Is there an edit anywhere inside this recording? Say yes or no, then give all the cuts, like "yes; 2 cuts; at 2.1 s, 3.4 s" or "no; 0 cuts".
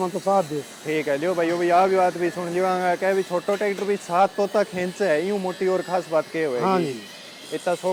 no; 0 cuts